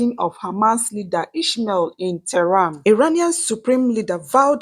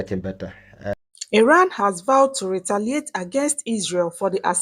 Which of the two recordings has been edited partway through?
first; 1 cut; at 2.7 s

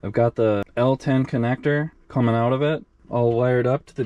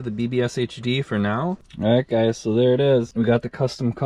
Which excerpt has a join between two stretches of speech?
second; 1 cut; at 1.6 s

